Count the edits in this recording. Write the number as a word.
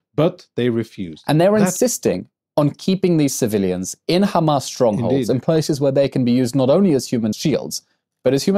two